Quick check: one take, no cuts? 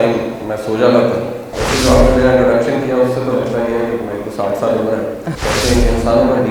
no; 2 cuts; at 1.5 s, 5.3 s

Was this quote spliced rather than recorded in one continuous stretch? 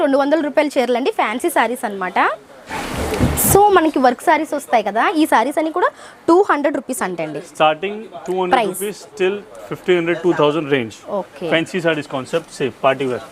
no; 0 cuts

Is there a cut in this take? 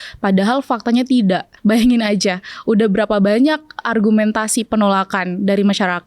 yes; 1 cut; at 1.5 s

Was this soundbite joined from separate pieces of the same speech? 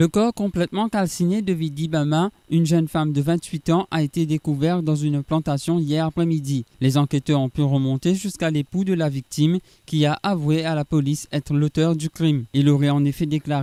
no; 0 cuts

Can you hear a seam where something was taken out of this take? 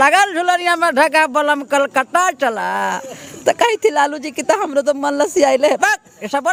no; 0 cuts

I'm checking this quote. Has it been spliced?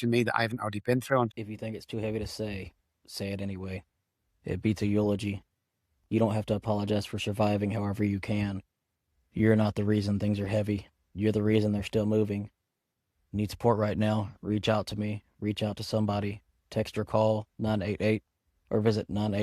yes; 1 cut; at 1.3 s

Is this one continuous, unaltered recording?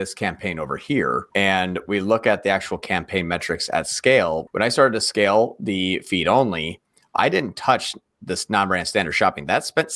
no; 2 cuts; at 1.3 s, 4.4 s

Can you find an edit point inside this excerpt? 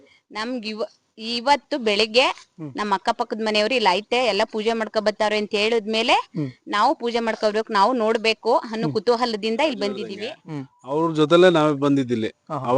yes; 1 cut; at 10.1 s

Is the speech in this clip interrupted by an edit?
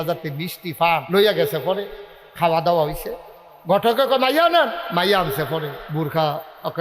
yes; 3 cuts; at 1.0 s, 4.8 s, 5.8 s

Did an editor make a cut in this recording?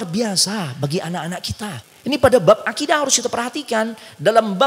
yes; 1 cut; at 1.9 s

